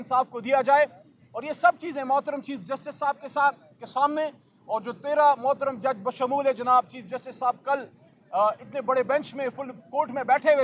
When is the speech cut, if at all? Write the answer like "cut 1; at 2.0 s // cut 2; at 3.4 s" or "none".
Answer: none